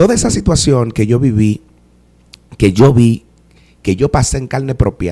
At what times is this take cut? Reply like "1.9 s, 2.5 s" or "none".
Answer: none